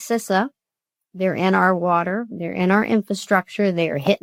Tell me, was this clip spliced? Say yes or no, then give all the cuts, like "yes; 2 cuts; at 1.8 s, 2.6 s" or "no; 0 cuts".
no; 0 cuts